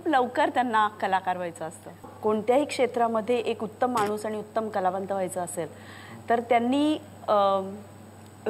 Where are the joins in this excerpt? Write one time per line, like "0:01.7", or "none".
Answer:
0:02.0